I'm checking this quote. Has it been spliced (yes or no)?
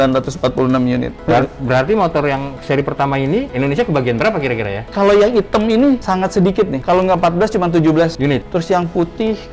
no